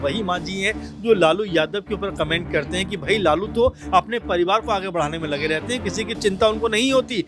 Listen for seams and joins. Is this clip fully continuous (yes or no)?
yes